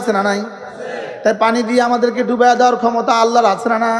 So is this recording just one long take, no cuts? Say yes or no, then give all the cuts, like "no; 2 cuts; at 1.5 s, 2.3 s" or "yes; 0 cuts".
yes; 0 cuts